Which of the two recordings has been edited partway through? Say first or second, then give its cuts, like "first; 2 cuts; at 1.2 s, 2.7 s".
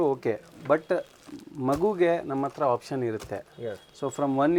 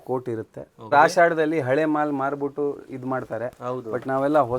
second; 1 cut; at 0.9 s